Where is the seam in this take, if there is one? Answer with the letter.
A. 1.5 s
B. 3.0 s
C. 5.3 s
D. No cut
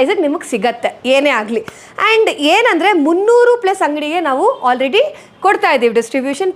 D